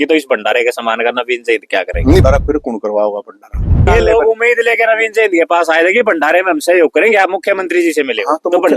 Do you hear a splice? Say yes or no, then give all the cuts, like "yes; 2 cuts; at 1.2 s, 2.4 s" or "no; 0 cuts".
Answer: yes; 2 cuts; at 2.2 s, 3.8 s